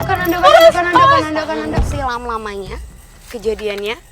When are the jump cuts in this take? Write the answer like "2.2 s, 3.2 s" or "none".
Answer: 1.7 s